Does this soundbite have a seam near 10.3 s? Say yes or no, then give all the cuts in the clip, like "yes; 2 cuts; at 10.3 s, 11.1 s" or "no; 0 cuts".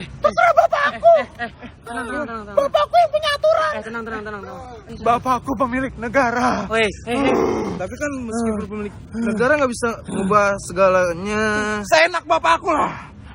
no; 1 cut; at 4.8 s